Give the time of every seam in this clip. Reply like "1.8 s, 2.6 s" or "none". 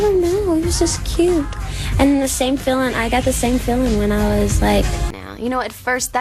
none

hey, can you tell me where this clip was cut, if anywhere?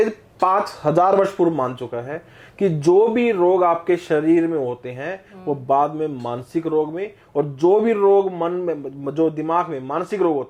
none

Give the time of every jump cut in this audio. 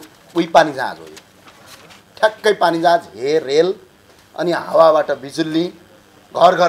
none

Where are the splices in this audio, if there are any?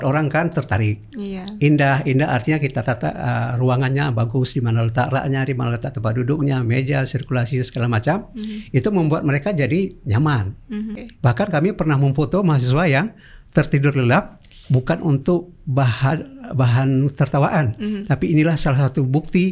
10.9 s

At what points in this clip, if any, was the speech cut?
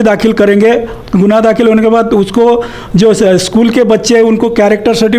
1.0 s

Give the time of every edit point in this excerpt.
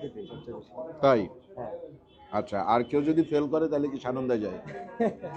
none

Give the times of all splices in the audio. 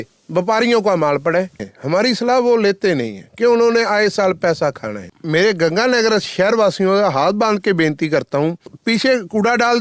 1.7 s, 5.1 s, 8.7 s

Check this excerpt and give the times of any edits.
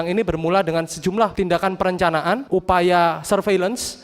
1.3 s, 2.4 s

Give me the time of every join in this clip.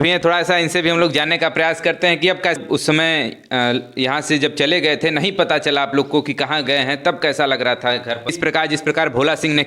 2.6 s, 8.3 s

